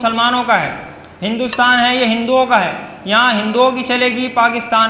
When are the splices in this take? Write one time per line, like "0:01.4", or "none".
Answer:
none